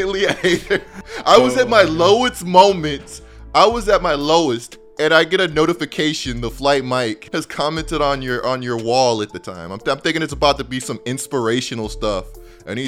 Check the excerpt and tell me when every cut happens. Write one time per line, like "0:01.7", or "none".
0:07.2